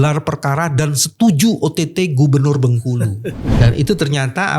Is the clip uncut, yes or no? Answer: no